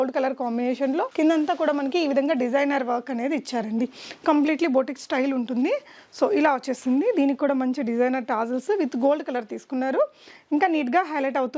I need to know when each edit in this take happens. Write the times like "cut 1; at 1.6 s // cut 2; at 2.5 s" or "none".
none